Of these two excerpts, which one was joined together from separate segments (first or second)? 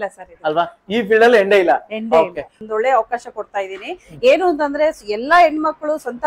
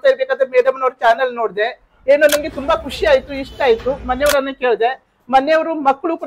first